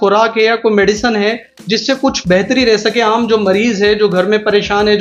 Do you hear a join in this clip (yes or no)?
no